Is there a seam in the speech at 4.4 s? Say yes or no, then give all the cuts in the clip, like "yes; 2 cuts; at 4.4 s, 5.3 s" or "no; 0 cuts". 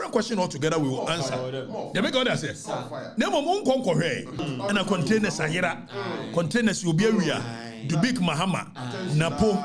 yes; 1 cut; at 4.4 s